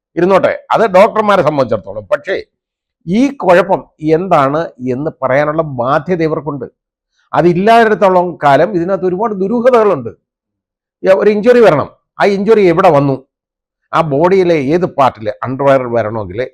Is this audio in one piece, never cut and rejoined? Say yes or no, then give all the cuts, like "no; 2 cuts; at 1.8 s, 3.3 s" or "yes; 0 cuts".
yes; 0 cuts